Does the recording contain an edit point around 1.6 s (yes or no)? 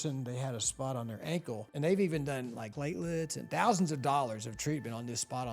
yes